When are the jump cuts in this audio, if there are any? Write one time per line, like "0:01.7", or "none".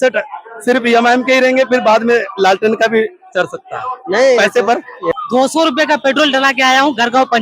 0:05.1